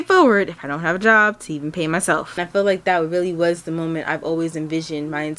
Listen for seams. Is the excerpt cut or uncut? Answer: cut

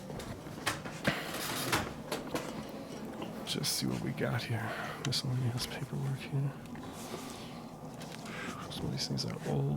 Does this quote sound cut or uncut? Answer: cut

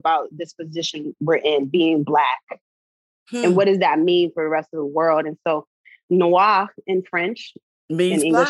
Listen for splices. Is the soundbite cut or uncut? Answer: uncut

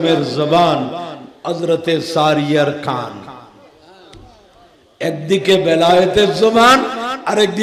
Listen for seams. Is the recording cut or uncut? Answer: uncut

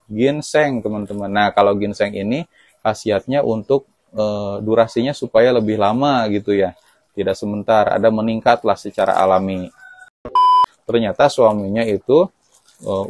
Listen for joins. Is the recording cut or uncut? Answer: cut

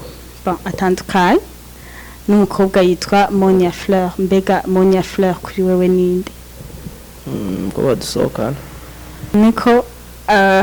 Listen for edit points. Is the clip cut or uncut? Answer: cut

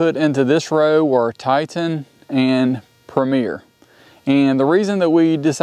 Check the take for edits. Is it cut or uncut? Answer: uncut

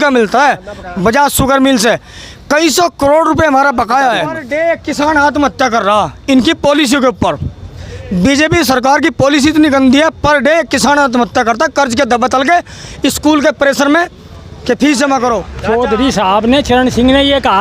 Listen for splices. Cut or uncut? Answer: cut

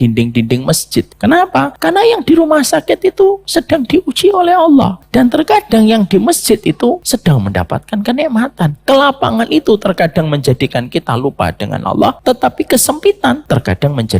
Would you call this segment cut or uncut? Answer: cut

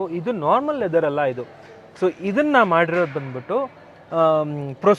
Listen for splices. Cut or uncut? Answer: uncut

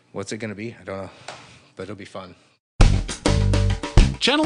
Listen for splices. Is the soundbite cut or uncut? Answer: cut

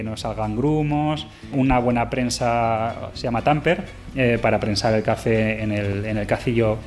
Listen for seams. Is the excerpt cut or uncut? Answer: cut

